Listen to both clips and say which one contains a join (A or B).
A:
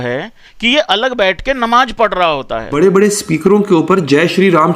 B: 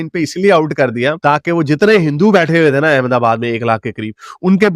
A